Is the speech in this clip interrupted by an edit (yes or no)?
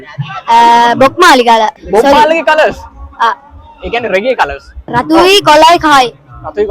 yes